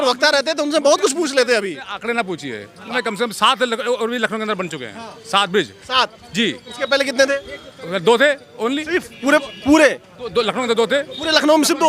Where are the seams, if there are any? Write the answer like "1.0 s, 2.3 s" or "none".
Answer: 2.9 s